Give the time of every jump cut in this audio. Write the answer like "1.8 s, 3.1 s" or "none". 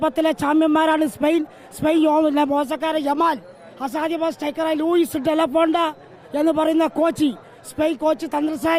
none